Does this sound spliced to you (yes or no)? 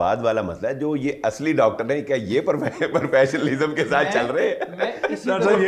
no